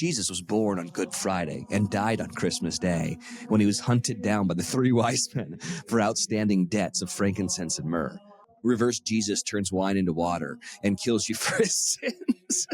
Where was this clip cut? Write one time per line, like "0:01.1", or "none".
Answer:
0:08.4